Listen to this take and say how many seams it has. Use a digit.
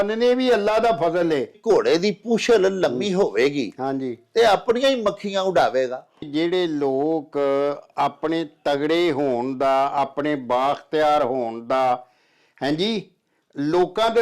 2